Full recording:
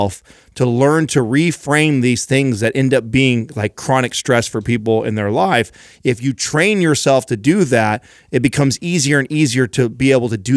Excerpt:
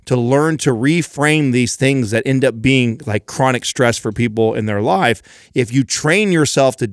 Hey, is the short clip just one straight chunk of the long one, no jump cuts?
yes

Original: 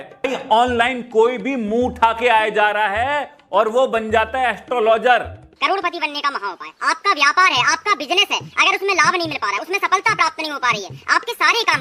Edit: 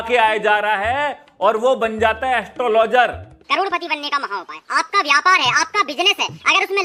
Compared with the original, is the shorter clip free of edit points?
yes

